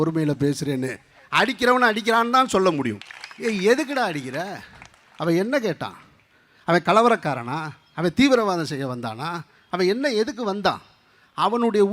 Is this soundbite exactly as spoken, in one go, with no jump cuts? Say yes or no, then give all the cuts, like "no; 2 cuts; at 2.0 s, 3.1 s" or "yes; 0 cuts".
no; 1 cut; at 3.0 s